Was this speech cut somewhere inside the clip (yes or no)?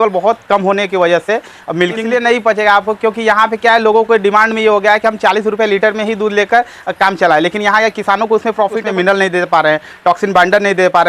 yes